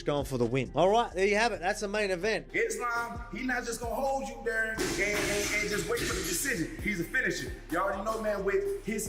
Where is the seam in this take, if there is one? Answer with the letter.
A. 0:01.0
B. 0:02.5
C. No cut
B